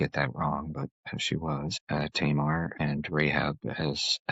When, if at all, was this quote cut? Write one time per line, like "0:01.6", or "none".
0:01.8
0:02.7

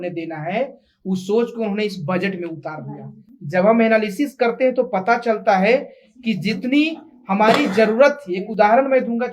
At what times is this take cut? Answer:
none

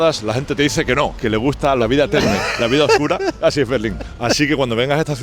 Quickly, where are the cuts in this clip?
0:01.4

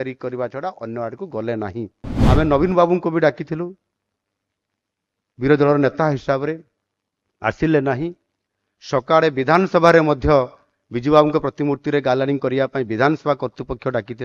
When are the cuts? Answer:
0:02.1

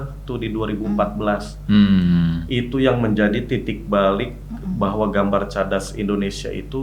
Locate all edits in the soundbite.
none

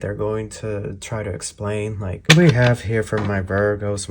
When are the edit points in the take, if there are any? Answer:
0:02.3

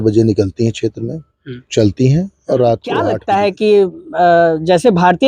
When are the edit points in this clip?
0:03.2

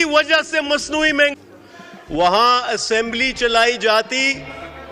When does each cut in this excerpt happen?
0:01.3

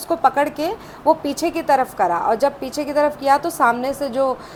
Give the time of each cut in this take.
none

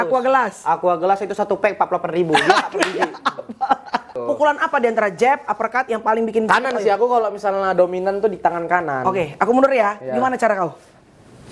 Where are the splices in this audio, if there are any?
0:04.1

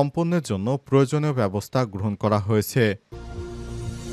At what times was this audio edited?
0:03.1

